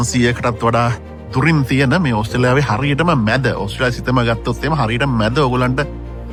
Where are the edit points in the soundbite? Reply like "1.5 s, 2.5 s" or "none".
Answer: none